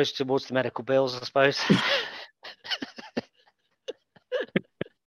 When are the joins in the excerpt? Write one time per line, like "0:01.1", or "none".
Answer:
0:04.1